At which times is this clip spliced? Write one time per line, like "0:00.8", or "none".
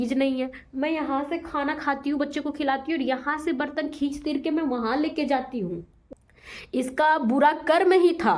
0:06.0